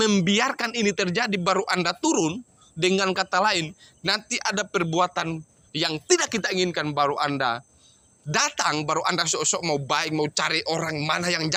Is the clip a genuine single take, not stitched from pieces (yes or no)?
yes